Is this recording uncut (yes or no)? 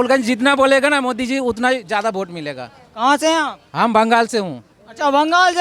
yes